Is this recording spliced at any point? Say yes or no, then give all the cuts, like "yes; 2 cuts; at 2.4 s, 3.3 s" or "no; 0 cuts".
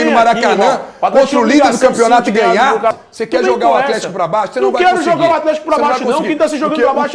yes; 1 cut; at 2.9 s